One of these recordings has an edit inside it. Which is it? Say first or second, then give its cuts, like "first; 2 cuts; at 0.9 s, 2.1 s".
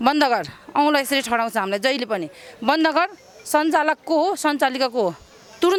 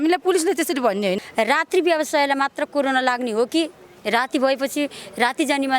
second; 1 cut; at 1.2 s